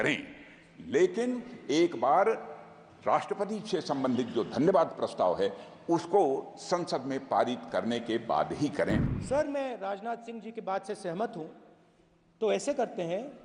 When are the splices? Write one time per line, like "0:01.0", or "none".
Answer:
0:09.1